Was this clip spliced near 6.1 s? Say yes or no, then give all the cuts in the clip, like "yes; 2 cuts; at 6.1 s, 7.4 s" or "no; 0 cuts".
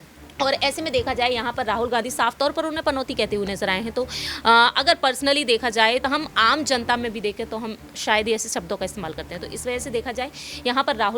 yes; 1 cut; at 6.1 s